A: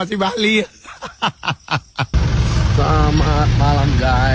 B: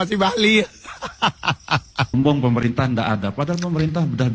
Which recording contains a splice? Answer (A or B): B